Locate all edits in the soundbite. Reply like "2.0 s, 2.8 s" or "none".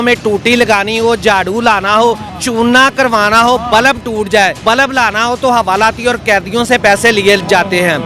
2.3 s, 4.6 s